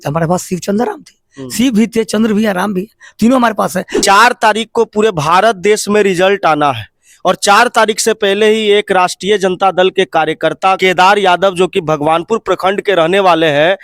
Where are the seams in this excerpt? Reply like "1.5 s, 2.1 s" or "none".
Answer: 3.9 s, 10.8 s